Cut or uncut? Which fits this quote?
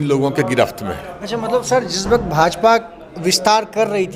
uncut